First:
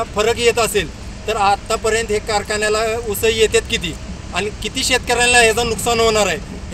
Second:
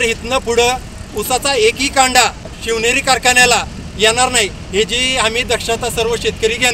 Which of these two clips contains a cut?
second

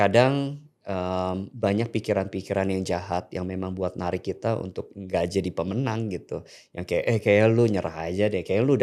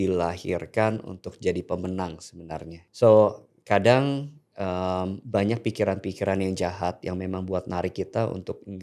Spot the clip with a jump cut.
second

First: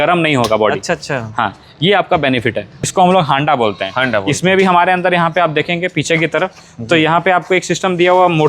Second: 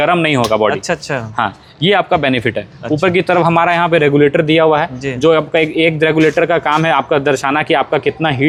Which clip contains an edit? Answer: first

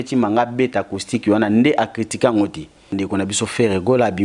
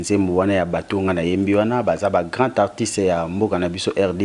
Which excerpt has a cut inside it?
first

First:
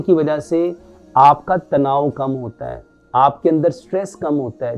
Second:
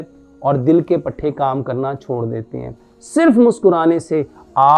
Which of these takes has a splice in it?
second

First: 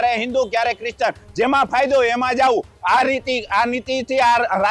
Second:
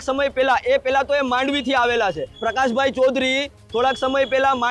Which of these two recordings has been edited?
second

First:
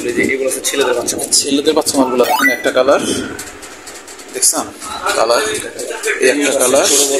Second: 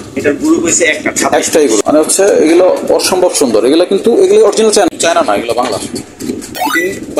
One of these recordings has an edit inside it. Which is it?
second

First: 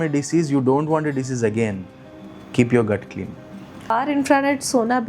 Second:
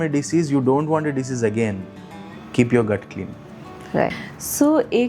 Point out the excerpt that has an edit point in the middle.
first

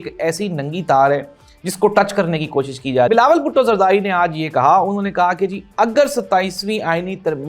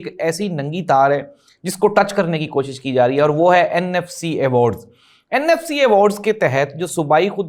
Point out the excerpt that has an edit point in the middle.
first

